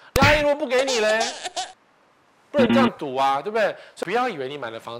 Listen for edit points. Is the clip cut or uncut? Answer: cut